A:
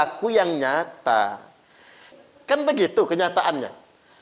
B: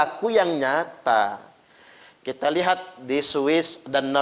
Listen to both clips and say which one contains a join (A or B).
A